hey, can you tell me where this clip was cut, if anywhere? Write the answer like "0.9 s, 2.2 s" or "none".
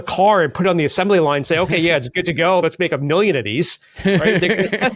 2.6 s